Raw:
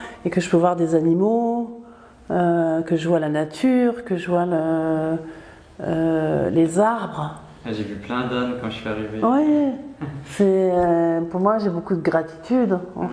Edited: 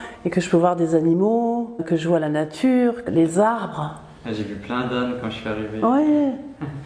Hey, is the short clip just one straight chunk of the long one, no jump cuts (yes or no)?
no